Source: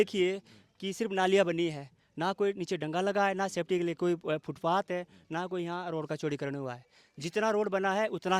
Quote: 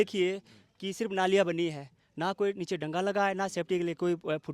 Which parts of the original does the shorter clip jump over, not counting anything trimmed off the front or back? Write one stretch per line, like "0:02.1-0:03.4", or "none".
none